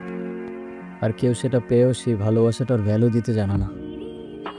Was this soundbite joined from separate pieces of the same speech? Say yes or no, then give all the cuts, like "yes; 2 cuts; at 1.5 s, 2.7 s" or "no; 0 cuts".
yes; 1 cut; at 3.7 s